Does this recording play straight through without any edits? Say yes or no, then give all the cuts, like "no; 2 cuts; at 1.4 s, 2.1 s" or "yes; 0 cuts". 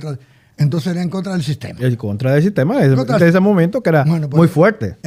yes; 0 cuts